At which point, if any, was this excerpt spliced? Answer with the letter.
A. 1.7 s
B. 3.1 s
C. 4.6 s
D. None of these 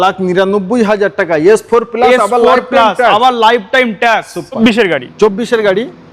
C